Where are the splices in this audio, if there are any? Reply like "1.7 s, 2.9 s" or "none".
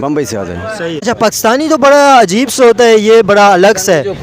1.0 s